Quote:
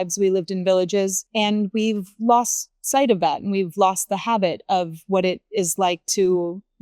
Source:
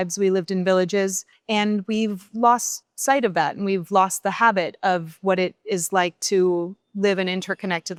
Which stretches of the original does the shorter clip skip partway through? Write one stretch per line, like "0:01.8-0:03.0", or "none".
0:01.2-0:01.4